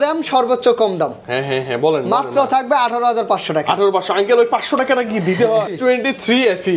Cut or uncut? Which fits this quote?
cut